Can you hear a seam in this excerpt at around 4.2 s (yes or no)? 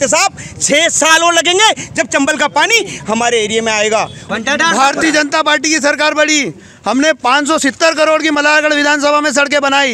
yes